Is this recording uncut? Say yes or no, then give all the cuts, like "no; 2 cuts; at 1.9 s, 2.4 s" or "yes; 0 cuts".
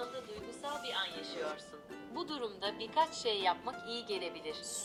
yes; 0 cuts